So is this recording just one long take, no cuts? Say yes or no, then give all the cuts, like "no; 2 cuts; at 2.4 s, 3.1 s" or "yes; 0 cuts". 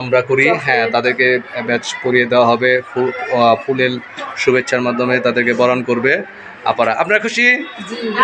yes; 0 cuts